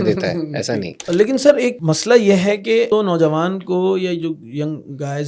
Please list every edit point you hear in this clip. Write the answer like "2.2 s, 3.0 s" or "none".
1.0 s, 1.8 s, 2.9 s

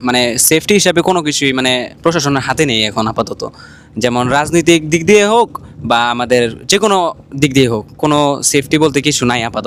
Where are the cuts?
none

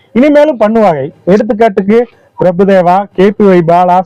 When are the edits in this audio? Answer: none

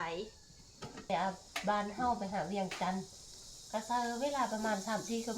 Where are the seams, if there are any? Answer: 1.1 s

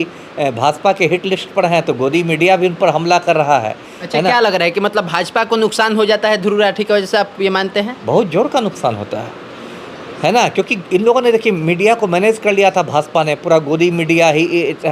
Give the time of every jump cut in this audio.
none

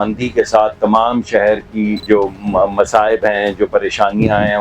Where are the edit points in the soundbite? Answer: 2.0 s

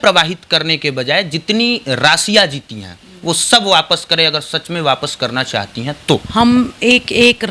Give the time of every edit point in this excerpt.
6.3 s

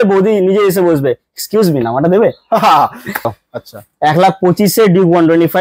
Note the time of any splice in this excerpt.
3.3 s

